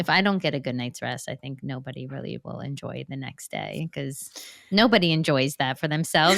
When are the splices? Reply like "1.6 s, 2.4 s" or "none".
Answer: none